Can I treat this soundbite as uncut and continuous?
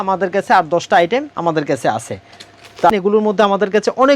no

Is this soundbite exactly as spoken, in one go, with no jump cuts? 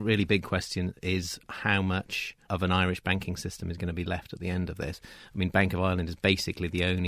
no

